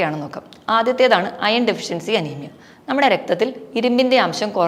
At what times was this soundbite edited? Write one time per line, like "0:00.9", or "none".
none